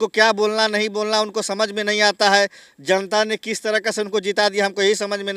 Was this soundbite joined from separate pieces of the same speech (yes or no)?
no